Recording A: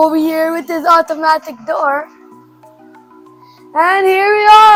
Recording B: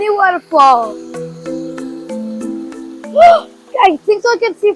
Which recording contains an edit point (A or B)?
B